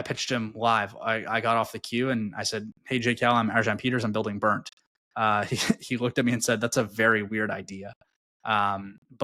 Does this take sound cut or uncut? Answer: uncut